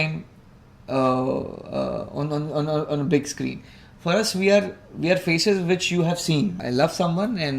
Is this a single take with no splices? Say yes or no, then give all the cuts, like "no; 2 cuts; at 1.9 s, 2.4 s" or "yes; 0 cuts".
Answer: no; 1 cut; at 6.6 s